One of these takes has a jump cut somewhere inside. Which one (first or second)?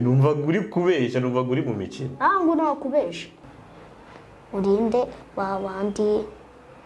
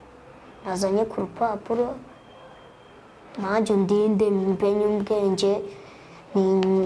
first